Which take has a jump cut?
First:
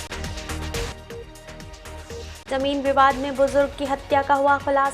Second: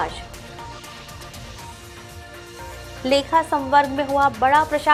first; 1 cut; at 0.9 s

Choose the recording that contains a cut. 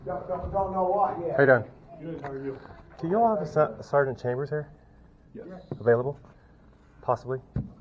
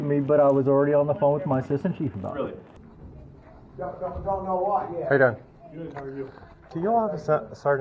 second; 1 cut; at 2.7 s

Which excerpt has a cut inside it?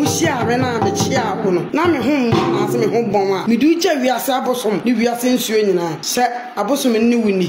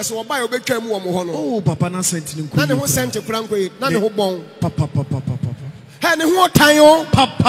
first; 4 cuts; at 1.7 s, 3.4 s, 4.8 s, 6.0 s

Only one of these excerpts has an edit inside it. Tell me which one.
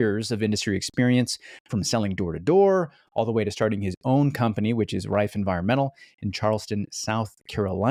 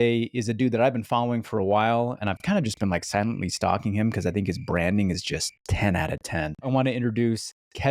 second; 3 cuts; at 2.2 s, 5.6 s, 6.7 s

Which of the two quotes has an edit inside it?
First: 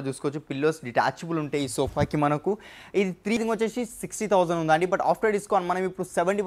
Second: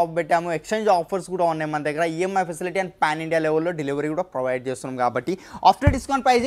first; 1 cut; at 3.4 s

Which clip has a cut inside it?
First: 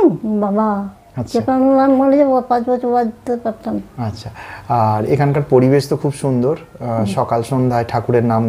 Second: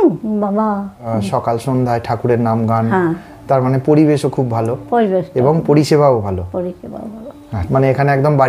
second; 2 cuts; at 0.9 s, 7.6 s

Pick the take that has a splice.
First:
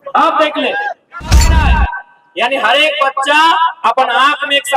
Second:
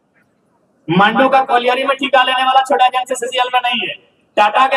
first; 1 cut; at 1.6 s

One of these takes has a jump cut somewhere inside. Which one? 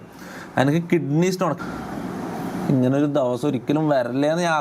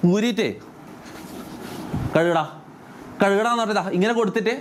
first; 1 cut; at 1.6 s

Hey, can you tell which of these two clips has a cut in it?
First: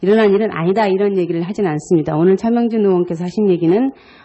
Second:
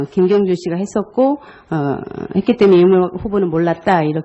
first; 1 cut; at 2.4 s

